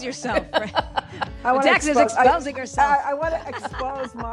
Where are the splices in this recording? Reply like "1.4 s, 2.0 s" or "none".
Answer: none